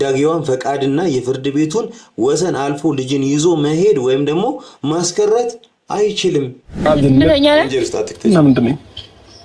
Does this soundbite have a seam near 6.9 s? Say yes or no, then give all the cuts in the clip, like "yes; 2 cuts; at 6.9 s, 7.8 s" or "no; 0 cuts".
yes; 1 cut; at 6.9 s